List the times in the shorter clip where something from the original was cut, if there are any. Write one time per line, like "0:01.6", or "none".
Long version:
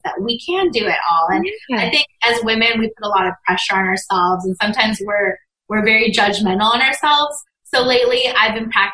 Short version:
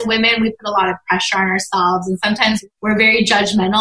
0:02.6